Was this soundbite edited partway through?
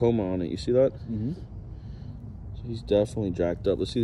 no; 0 cuts

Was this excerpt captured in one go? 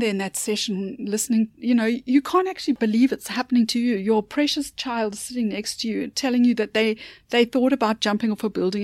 no; 1 cut; at 2.8 s

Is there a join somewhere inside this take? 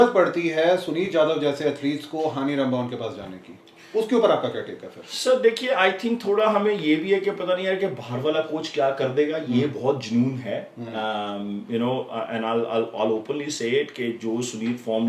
no; 0 cuts

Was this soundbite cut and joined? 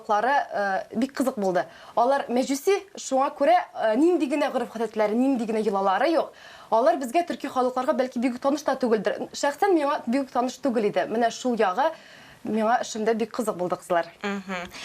no; 0 cuts

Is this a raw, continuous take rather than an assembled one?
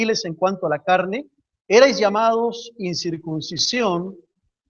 yes; 0 cuts

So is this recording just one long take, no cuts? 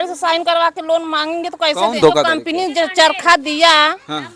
no; 1 cut; at 2.0 s

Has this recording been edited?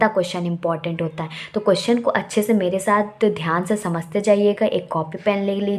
no; 0 cuts

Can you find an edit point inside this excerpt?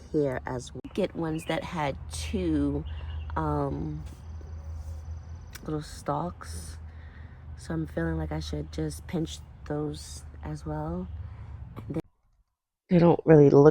yes; 2 cuts; at 0.8 s, 12.0 s

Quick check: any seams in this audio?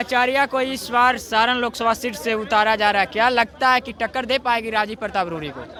no; 0 cuts

